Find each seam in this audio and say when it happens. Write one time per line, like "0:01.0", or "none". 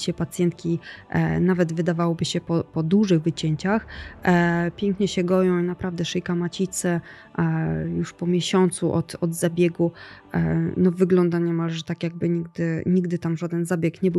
none